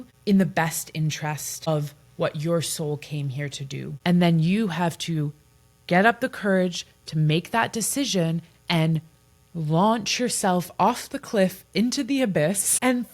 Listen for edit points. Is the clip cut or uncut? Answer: cut